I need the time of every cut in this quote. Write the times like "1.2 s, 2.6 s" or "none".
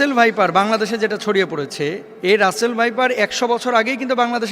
2.1 s